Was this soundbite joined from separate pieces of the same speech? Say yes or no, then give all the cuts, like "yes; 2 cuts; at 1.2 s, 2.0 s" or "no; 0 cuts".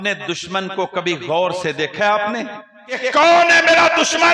yes; 1 cut; at 3.0 s